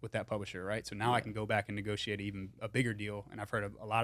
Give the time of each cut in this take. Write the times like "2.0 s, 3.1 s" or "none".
none